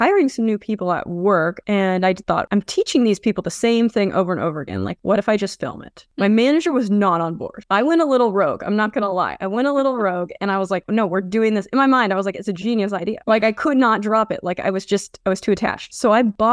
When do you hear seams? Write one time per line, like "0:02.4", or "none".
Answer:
0:01.6
0:02.5